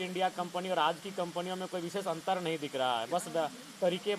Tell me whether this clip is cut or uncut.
uncut